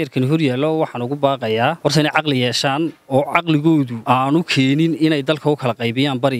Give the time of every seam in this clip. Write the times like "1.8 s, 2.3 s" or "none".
1.8 s, 4.0 s